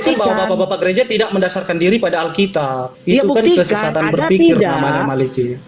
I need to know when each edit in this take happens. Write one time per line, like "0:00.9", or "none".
0:02.9